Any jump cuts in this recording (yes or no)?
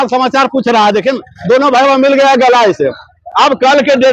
no